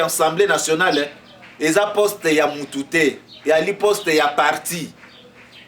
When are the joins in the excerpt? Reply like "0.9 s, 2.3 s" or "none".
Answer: none